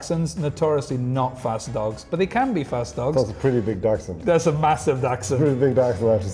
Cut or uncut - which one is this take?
uncut